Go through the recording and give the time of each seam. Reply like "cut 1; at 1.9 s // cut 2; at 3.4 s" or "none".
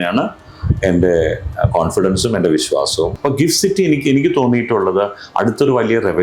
cut 1; at 3.1 s